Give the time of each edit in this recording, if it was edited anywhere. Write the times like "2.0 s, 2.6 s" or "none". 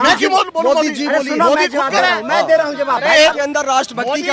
3.4 s